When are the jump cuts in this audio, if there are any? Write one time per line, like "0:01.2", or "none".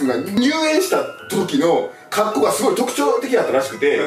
none